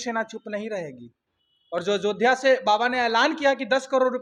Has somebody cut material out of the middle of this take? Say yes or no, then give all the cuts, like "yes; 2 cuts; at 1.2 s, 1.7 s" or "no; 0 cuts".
no; 0 cuts